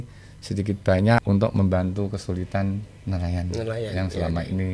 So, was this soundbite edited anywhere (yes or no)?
yes